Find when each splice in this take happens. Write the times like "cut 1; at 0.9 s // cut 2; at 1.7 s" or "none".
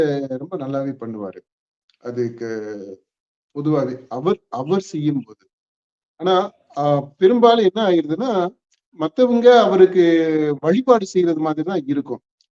none

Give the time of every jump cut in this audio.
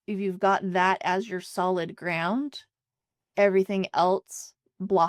none

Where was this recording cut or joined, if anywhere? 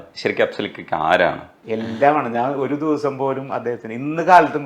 cut 1; at 1.5 s

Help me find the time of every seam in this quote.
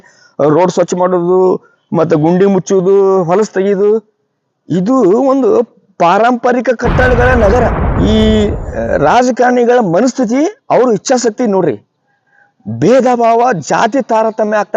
cut 1; at 7.8 s

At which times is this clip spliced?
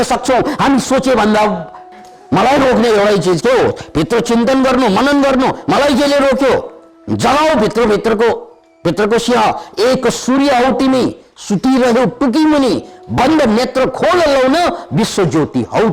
cut 1; at 1.7 s

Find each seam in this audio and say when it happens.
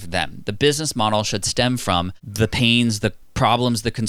cut 1; at 2.2 s // cut 2; at 3.2 s

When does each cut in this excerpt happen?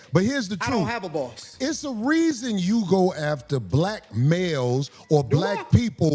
cut 1; at 1.8 s

